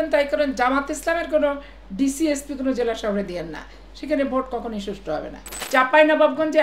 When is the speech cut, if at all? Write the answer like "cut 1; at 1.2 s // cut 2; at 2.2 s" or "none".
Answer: cut 1; at 5.4 s